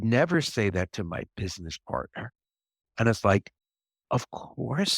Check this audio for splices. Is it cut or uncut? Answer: cut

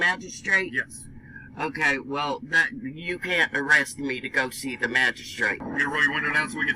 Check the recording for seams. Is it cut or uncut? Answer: cut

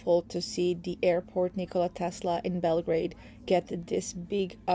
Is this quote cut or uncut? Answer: uncut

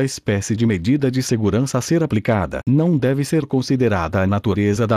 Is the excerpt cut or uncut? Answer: uncut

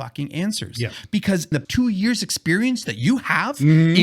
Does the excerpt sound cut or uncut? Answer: cut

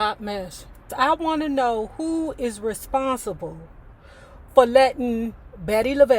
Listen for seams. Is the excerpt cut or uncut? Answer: cut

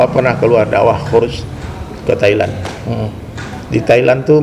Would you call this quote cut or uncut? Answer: uncut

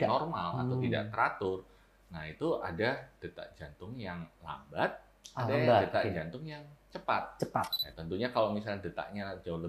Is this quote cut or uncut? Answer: cut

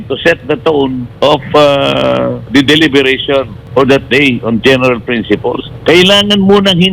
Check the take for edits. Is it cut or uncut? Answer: cut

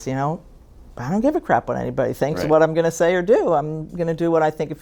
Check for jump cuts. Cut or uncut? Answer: uncut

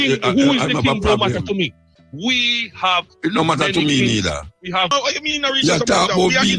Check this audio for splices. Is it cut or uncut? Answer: cut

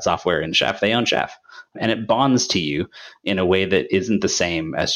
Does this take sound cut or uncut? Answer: cut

